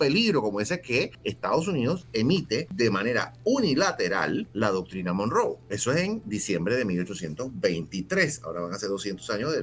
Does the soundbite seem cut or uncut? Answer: cut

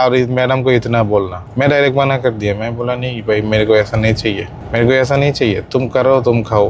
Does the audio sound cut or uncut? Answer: cut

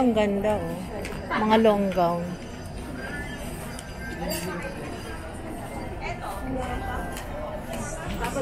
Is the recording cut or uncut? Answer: uncut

